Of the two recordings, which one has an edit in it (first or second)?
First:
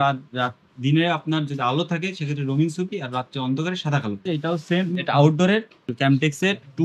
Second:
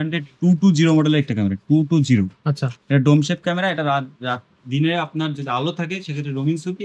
first